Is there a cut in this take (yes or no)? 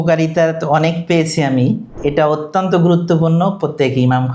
yes